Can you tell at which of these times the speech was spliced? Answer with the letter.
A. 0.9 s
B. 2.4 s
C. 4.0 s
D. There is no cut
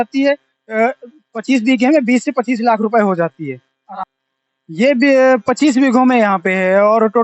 C